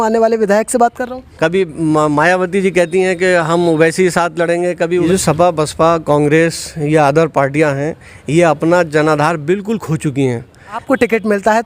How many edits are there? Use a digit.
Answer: 3